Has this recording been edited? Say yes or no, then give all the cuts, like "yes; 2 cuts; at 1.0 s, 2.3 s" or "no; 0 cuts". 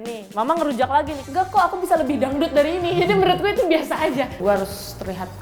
yes; 2 cuts; at 1.2 s, 4.4 s